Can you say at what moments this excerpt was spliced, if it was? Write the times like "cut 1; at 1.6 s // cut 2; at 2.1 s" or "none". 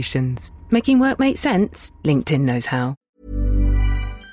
cut 1; at 3.1 s